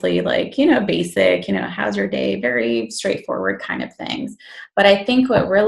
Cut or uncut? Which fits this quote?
uncut